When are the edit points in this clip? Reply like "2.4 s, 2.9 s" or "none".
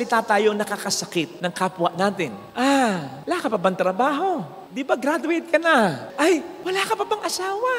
2.4 s, 6.1 s